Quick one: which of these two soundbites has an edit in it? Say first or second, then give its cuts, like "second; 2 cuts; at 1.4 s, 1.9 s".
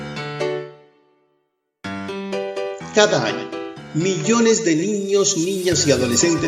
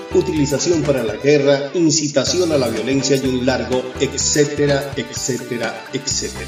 first; 1 cut; at 2.9 s